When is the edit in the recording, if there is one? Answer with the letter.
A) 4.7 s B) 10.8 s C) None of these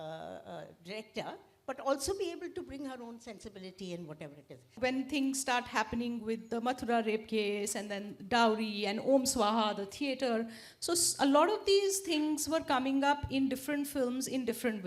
A